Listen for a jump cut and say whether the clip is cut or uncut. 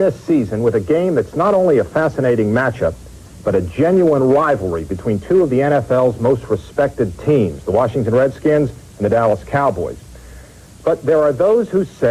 uncut